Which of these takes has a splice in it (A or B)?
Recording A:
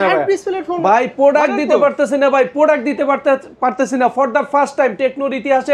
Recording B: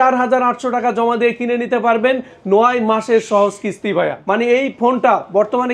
B